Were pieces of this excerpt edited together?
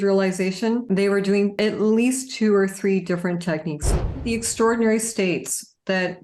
yes; 3 cuts; at 0.8 s, 1.5 s, 3.9 s

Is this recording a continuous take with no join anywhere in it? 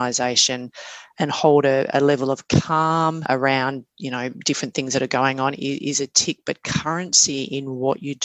no; 1 cut; at 3.2 s

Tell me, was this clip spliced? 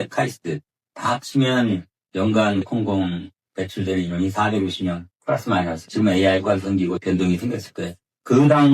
yes; 1 cut; at 5.8 s

